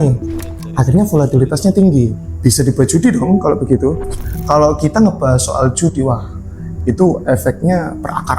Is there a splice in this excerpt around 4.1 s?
yes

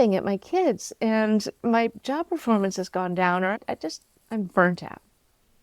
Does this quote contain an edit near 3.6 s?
yes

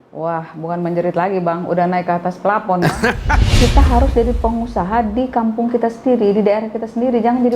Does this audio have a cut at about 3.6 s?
yes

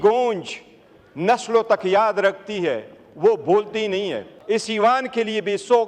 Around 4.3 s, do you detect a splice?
yes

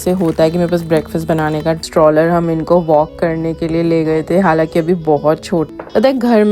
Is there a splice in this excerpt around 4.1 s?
no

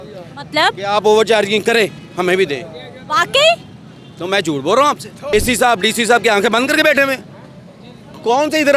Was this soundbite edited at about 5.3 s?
yes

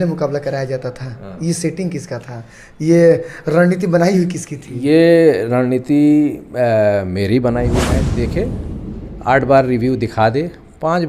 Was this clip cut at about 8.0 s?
yes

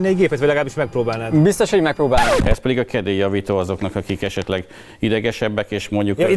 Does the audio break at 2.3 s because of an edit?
yes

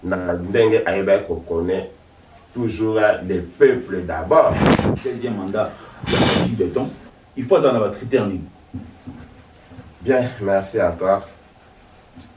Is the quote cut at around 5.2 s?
yes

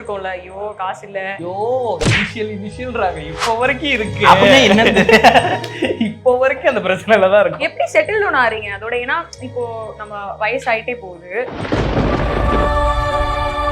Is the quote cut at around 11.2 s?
no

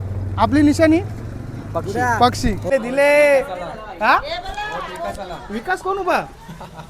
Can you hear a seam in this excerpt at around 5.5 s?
no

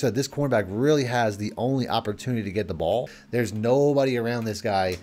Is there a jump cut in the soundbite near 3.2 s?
yes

